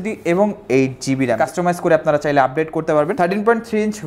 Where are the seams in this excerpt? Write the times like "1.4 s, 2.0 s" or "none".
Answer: 1.4 s, 3.1 s